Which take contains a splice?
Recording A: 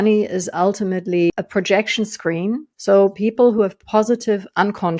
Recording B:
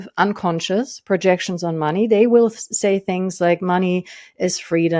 A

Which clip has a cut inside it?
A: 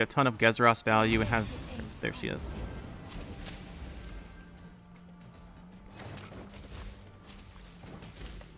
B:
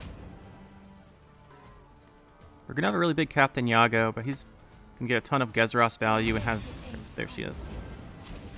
B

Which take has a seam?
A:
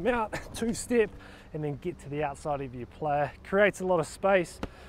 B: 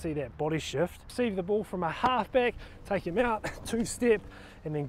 B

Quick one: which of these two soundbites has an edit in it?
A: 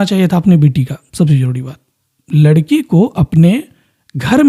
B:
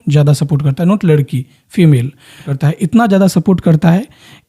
B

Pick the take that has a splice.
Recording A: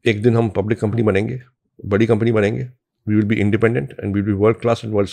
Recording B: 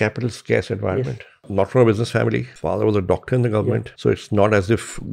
B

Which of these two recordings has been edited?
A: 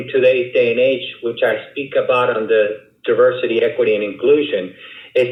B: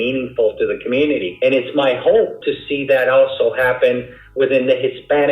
B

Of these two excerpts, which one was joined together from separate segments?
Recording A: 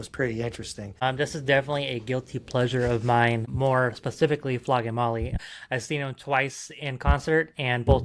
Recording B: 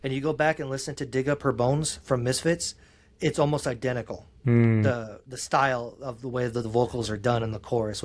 A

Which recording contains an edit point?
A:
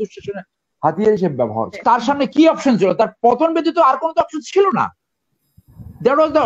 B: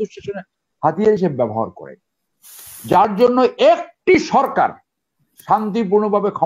A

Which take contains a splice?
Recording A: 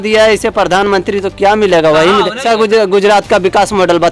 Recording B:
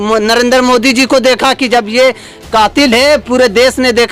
A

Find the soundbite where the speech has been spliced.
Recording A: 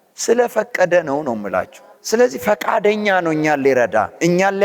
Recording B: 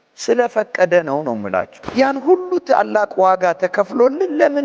B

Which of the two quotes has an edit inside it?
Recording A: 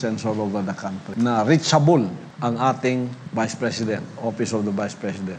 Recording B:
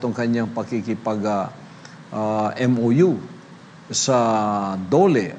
A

